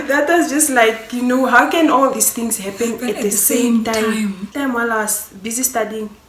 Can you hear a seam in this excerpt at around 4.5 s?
yes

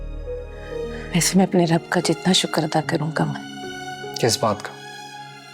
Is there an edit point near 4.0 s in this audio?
no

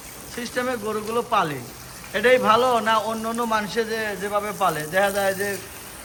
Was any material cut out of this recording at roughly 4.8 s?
no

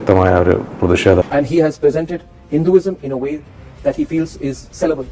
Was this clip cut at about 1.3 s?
yes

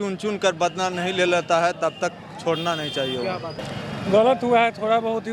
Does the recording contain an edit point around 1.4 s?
no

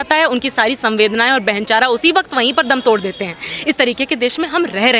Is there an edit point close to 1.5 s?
no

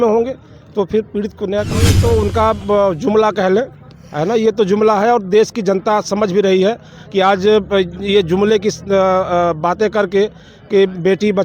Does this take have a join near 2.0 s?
yes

